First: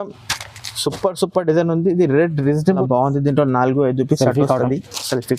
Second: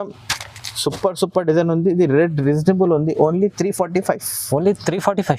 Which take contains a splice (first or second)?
first